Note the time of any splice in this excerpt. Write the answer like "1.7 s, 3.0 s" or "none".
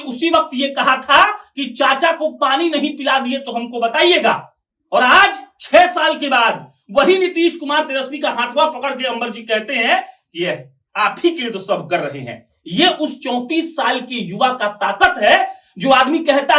none